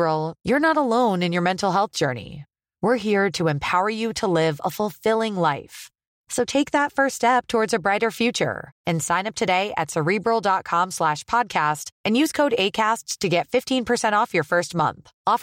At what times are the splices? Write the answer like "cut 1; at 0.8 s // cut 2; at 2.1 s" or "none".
none